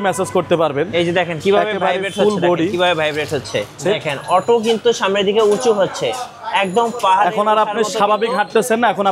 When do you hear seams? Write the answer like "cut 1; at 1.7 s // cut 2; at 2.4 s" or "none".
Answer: cut 1; at 3.8 s